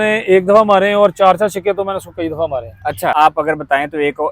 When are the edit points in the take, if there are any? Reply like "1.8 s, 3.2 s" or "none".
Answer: 3.1 s